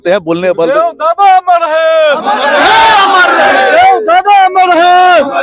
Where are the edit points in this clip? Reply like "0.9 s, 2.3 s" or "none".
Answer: none